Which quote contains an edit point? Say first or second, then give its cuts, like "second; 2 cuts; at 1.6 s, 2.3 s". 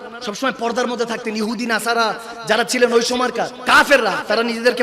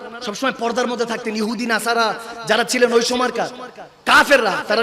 first; 1 cut; at 3.5 s